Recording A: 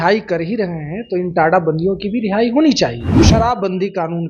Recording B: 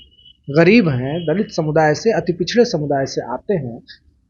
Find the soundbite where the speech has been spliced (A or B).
A